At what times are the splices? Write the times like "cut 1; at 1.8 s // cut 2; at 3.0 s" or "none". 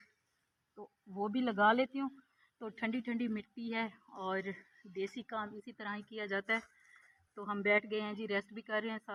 none